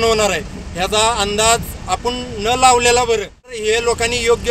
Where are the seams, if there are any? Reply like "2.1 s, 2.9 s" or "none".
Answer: 3.6 s